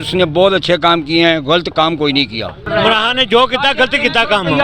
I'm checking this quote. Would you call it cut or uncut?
cut